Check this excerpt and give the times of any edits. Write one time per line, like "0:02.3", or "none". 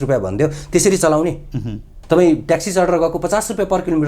0:01.9